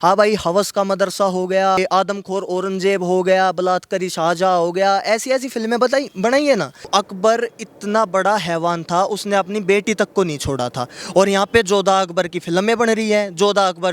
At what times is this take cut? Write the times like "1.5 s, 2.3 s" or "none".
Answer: 1.8 s, 6.9 s